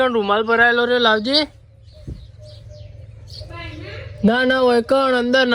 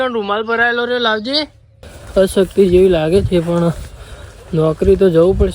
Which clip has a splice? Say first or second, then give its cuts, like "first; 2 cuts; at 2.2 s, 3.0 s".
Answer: second; 1 cut; at 1.9 s